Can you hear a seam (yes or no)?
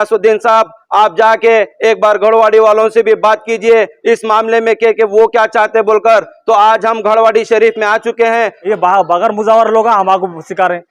yes